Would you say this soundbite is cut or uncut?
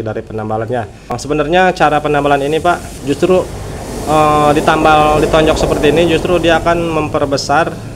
cut